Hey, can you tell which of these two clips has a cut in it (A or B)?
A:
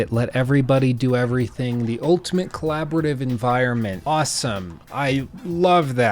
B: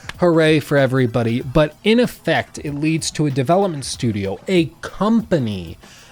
A